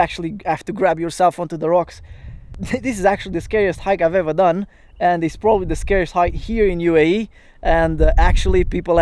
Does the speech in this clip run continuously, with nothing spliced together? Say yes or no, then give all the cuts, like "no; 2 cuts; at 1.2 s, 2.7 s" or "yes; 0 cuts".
no; 1 cut; at 2.5 s